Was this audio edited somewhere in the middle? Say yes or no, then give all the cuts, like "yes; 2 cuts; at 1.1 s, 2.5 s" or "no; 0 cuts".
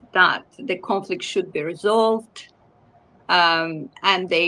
no; 0 cuts